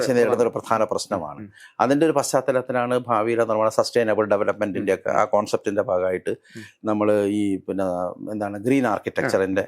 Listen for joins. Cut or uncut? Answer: uncut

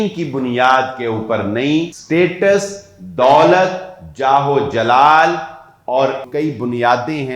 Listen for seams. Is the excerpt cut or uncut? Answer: cut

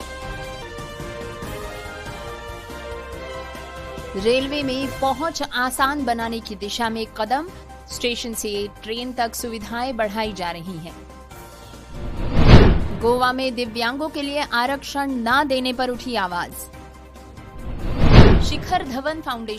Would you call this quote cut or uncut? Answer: uncut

